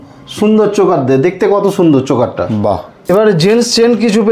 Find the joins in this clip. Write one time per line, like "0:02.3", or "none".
0:02.9